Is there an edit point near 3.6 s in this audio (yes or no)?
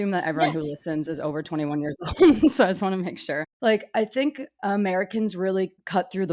no